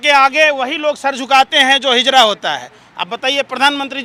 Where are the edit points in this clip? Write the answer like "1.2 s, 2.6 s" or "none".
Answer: none